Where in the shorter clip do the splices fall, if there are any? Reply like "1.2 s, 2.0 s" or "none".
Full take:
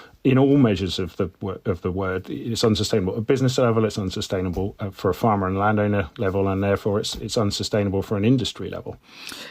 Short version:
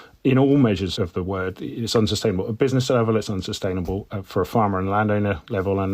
0.9 s

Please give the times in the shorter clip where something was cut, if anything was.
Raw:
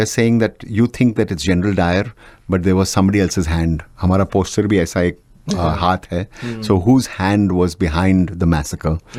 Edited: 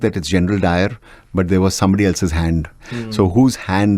2.8 s

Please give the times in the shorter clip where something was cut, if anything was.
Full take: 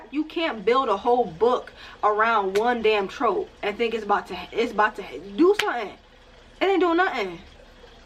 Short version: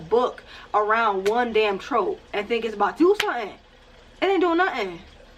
2.9 s

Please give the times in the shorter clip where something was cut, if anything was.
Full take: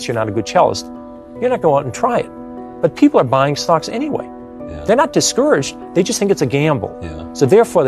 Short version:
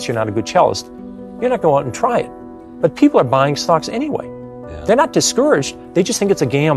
none

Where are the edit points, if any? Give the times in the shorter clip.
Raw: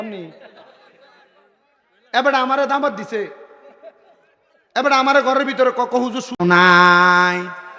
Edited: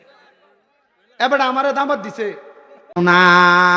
2.8 s

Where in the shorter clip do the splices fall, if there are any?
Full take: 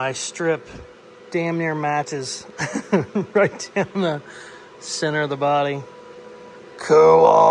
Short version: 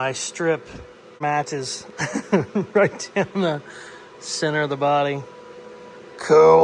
1.2 s

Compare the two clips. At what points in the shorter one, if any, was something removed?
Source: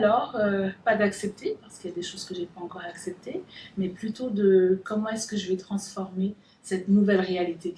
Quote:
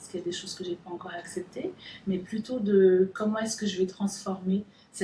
none

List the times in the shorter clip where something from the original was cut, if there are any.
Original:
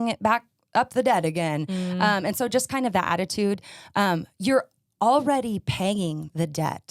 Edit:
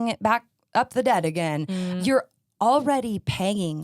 1.9 s

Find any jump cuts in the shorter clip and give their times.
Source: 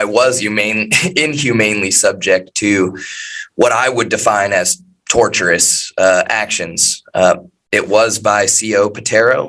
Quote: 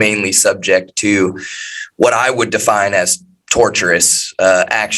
none

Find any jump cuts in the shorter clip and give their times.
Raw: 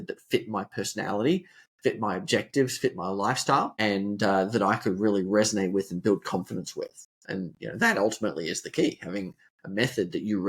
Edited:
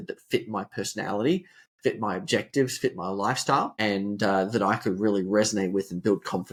none

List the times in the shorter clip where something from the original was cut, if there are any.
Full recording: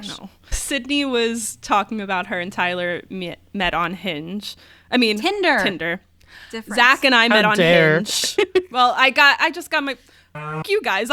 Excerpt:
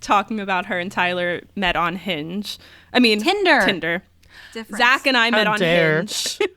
1.5 s

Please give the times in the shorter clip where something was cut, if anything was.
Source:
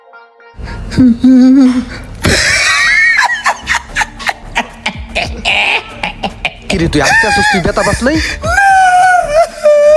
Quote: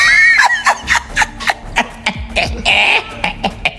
none

